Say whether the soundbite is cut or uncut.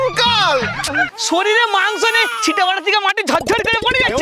cut